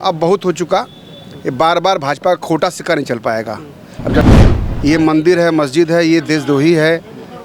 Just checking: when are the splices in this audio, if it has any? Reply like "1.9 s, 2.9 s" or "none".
4.3 s